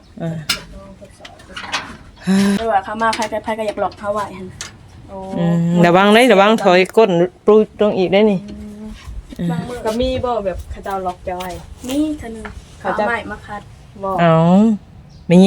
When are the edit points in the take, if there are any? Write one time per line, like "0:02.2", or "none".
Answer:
0:02.6